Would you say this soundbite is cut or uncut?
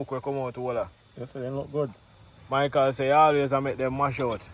uncut